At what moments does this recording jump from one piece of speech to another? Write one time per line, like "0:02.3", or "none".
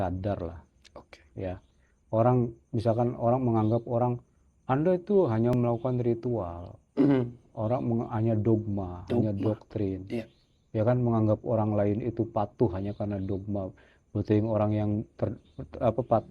none

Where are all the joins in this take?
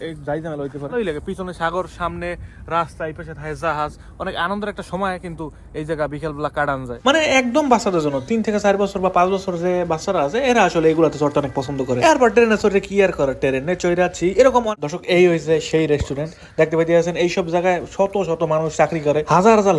0:00.9
0:06.9
0:14.7

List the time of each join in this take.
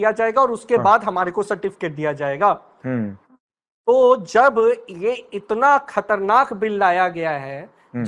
none

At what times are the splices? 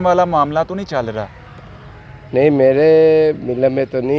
none

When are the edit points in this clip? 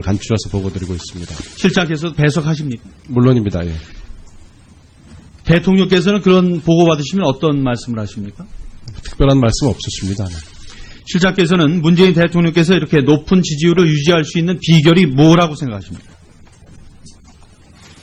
0:14.3

